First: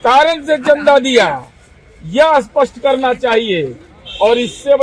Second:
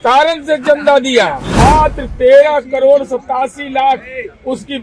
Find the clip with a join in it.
second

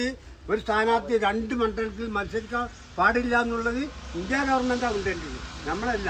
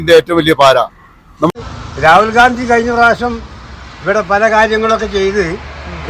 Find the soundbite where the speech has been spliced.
second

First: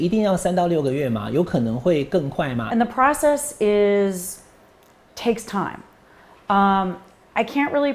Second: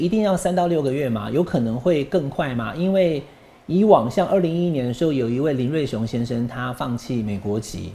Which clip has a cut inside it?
first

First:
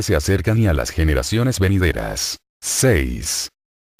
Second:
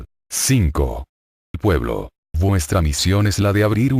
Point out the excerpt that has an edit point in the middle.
second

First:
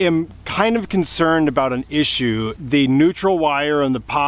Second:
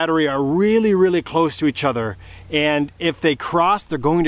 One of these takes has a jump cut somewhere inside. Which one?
first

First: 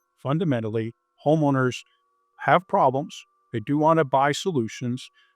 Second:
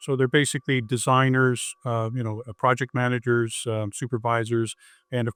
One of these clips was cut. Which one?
first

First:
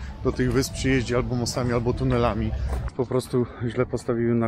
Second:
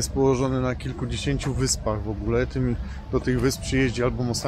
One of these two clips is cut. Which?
first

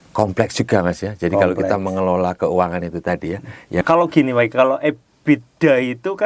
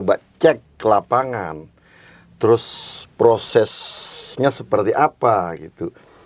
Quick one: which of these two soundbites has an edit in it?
first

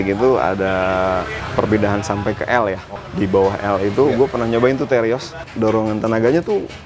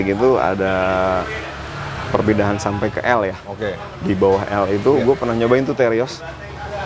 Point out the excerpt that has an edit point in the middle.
first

